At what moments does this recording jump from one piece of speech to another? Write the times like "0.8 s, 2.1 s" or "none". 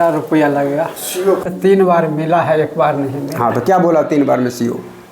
1.4 s